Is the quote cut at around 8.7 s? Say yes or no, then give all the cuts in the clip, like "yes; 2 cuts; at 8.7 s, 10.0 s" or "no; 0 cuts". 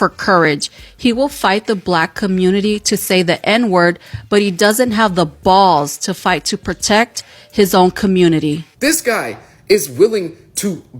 yes; 1 cut; at 8.7 s